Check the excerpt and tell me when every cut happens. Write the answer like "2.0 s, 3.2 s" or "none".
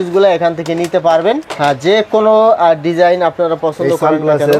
none